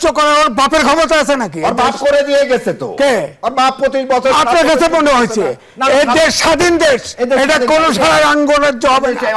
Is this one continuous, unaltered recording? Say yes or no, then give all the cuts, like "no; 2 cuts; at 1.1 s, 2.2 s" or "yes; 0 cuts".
yes; 0 cuts